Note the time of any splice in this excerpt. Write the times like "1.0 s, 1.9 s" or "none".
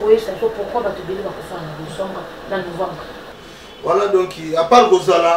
3.3 s